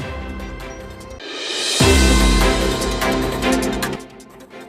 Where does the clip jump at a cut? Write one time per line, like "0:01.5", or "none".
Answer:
0:01.2
0:03.6